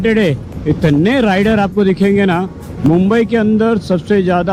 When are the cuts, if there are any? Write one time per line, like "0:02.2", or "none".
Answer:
none